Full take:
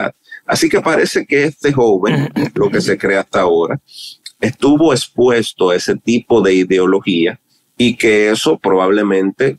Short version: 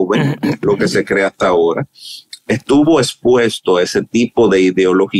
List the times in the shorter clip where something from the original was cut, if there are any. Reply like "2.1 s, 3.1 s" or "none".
none